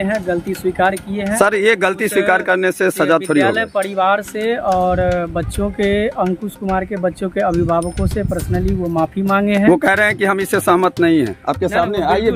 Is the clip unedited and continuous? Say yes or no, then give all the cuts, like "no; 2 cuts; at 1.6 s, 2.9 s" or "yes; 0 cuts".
yes; 0 cuts